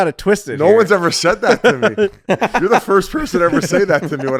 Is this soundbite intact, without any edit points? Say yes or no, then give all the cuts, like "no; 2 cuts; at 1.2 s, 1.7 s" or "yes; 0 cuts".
yes; 0 cuts